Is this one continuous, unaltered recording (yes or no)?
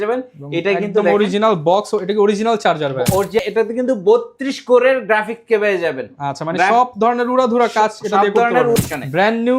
no